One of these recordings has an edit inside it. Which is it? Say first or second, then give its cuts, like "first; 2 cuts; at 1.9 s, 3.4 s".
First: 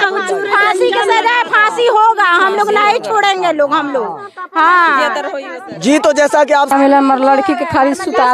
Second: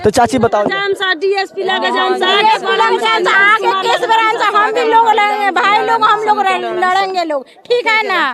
first; 1 cut; at 6.7 s